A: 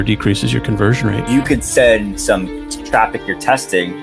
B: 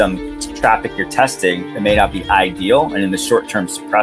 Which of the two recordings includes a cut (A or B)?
A